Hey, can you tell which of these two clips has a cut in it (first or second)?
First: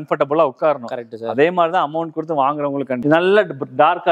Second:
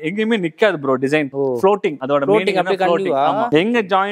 first